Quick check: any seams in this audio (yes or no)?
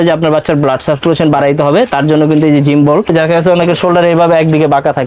yes